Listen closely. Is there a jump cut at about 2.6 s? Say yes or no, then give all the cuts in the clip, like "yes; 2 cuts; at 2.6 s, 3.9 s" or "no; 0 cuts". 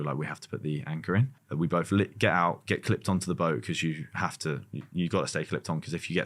no; 1 cut; at 1.3 s